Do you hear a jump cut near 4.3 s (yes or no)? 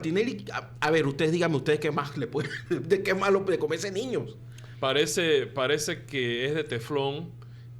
no